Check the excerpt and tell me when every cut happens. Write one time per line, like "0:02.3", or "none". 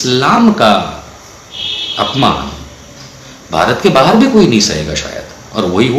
none